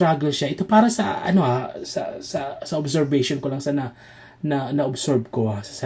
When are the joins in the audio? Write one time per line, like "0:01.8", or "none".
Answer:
none